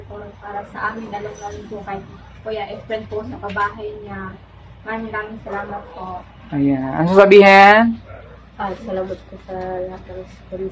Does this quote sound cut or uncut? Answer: uncut